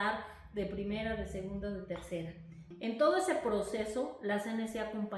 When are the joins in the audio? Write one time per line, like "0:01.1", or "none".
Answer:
0:02.7